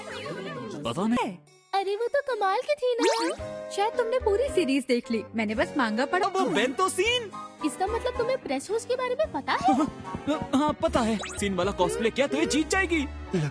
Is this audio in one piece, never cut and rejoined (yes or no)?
no